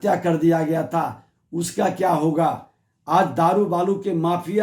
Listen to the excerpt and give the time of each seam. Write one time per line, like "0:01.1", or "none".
none